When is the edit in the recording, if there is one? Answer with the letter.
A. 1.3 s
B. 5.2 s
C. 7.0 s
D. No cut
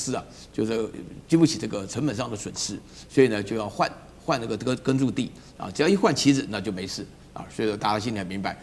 D